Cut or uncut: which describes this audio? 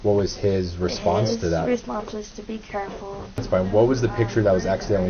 cut